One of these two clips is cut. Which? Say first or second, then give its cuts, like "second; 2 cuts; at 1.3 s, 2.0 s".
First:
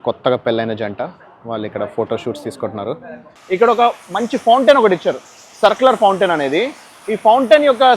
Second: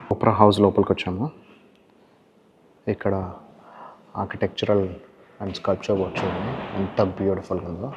first; 1 cut; at 3.3 s